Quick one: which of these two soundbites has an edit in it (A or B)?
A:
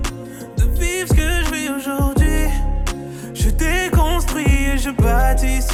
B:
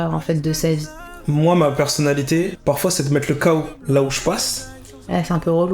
B